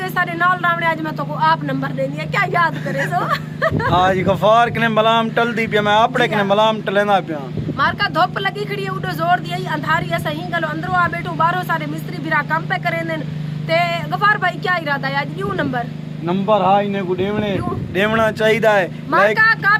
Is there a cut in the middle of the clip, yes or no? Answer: no